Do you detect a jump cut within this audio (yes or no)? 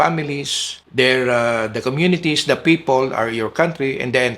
no